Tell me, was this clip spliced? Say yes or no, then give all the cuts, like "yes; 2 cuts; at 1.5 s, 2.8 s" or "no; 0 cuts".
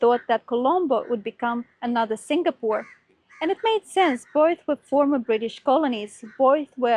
no; 0 cuts